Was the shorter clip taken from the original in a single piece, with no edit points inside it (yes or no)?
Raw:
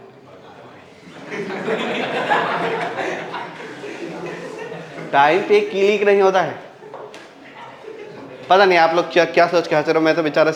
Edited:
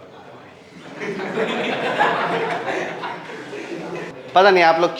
no